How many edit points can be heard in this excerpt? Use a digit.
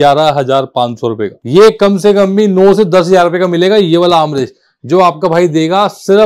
1